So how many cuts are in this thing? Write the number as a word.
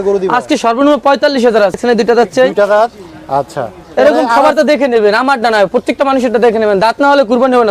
one